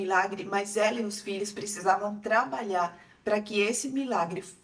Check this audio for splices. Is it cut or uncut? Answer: uncut